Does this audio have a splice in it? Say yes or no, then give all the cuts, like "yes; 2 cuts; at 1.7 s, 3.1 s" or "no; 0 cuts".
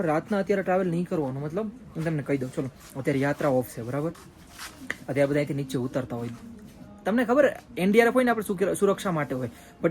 no; 0 cuts